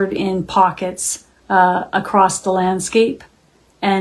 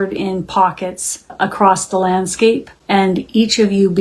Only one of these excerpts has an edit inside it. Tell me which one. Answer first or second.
second